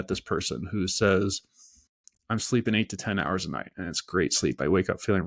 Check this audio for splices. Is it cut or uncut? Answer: uncut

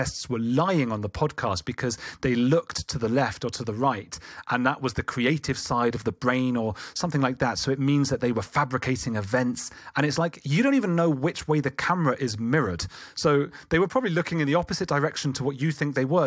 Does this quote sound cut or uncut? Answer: uncut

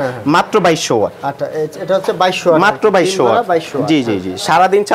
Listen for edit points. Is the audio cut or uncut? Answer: uncut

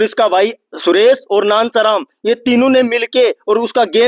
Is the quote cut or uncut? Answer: uncut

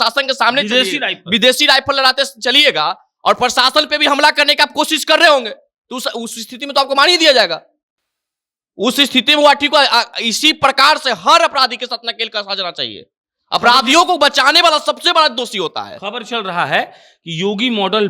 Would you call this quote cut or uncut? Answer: uncut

